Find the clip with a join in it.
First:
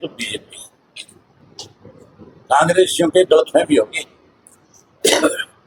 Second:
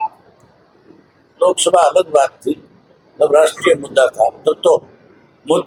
first; 1 cut; at 1.4 s

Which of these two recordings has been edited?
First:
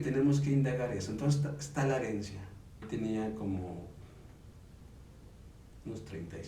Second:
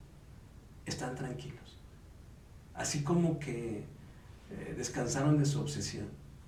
first; 1 cut; at 2.7 s

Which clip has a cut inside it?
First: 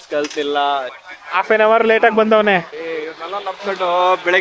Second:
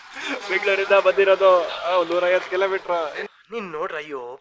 first; 2 cuts; at 0.9 s, 2.7 s

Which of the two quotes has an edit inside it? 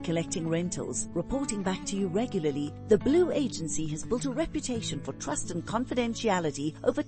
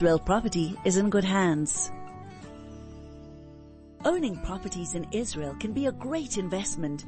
second; 2 cuts; at 1.7 s, 3.9 s

